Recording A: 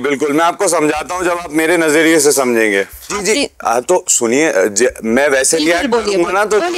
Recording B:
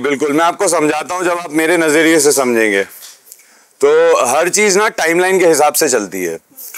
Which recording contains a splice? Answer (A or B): A